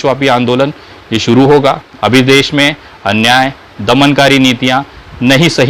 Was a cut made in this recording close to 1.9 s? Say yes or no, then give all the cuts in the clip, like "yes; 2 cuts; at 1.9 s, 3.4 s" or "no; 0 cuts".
yes; 1 cut; at 1.9 s